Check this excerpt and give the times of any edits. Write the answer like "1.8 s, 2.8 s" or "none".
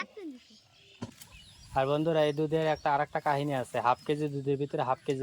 1.0 s